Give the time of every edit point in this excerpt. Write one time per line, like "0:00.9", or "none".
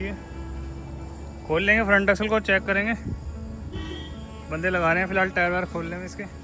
none